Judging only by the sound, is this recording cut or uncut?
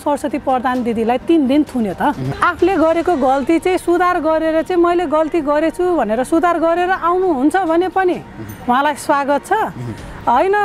cut